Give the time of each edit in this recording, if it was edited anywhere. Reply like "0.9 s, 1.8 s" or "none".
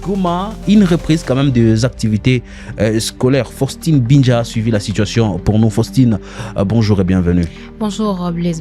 none

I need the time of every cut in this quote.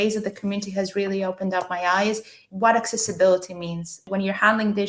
2.3 s, 4.0 s

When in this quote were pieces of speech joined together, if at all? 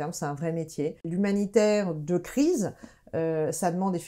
1.1 s

